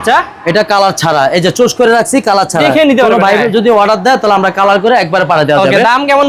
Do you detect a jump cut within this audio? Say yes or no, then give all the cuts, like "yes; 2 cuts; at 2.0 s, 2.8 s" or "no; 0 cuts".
no; 0 cuts